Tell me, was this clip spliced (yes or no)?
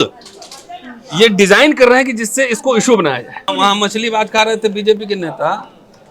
yes